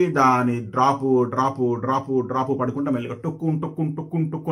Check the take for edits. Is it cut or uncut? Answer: uncut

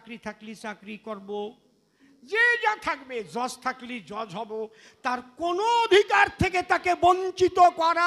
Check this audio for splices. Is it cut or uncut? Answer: uncut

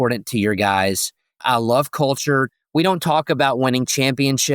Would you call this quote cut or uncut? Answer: cut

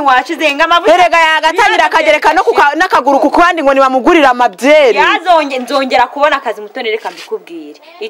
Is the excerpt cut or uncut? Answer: uncut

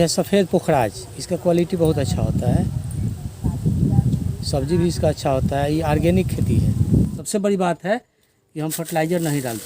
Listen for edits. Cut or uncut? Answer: cut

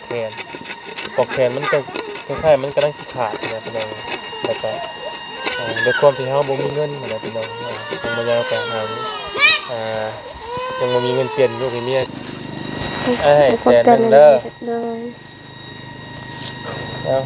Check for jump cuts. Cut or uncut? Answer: cut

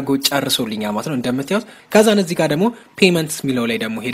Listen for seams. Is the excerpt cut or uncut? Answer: cut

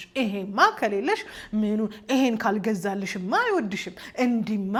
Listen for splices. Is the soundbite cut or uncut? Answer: uncut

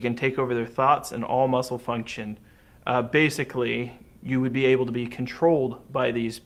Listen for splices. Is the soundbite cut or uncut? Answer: uncut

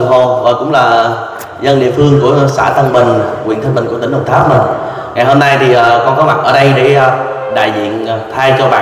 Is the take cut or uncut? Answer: uncut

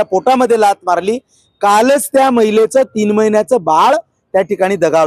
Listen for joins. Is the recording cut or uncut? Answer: uncut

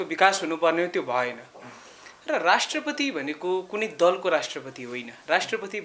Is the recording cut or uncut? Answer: uncut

